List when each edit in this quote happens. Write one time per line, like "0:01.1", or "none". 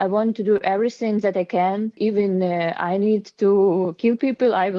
0:02.0